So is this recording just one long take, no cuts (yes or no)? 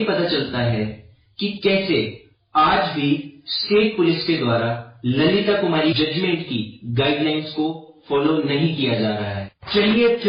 yes